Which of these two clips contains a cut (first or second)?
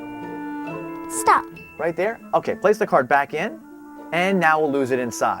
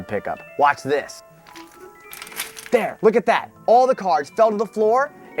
first